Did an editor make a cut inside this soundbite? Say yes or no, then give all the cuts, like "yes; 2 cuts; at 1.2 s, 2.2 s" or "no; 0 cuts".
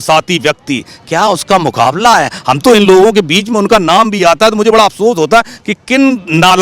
no; 0 cuts